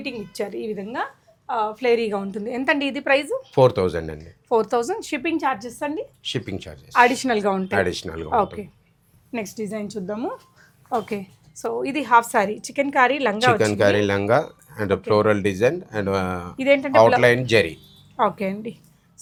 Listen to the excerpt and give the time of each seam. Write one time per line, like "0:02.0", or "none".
none